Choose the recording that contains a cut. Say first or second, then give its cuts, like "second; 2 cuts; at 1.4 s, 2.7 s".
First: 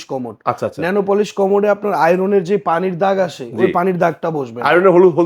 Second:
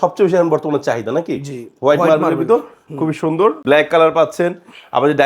second; 1 cut; at 3.6 s